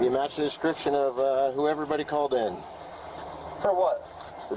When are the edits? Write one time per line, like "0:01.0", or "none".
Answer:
none